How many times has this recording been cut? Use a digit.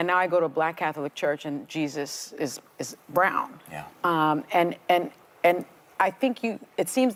0